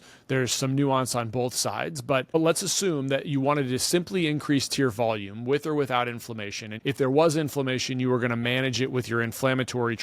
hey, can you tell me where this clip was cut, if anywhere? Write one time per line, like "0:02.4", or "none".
0:02.3
0:06.7